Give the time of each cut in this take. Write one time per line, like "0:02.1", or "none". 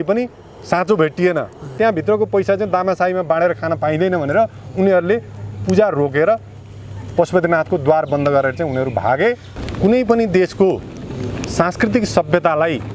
0:01.8
0:09.5